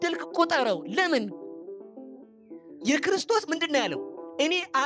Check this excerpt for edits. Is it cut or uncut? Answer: uncut